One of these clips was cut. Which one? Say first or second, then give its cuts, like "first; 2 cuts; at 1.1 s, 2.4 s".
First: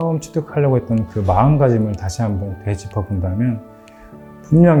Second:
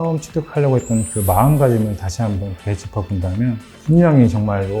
second; 1 cut; at 3.7 s